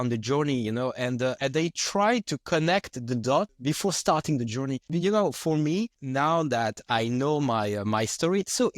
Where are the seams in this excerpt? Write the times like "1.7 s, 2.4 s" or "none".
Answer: 1.4 s, 3.5 s, 4.9 s, 6.0 s

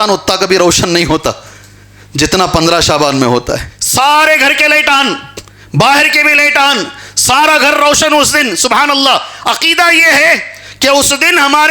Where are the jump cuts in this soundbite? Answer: 3.8 s

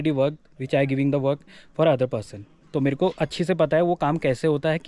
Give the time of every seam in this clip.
none

